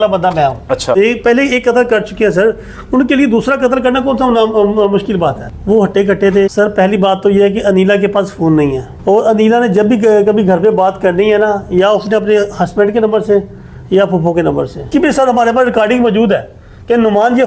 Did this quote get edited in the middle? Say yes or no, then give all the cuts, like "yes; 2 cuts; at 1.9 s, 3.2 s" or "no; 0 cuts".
yes; 3 cuts; at 0.9 s, 6.5 s, 14.9 s